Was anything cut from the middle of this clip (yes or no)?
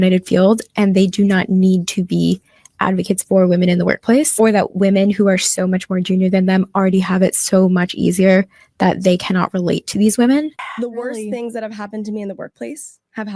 yes